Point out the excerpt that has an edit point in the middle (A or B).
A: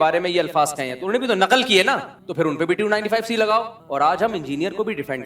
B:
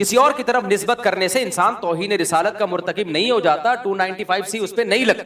A